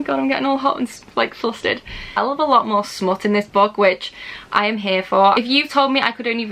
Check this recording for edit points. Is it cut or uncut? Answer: cut